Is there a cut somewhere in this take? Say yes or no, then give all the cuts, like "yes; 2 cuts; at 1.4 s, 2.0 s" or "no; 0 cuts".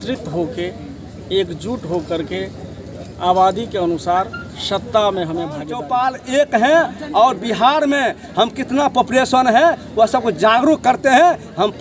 yes; 1 cut; at 5.7 s